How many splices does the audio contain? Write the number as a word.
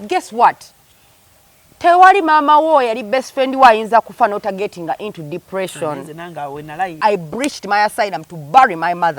one